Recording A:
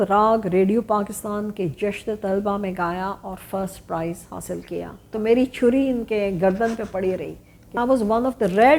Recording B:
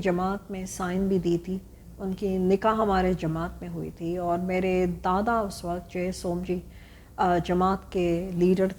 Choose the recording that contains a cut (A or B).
A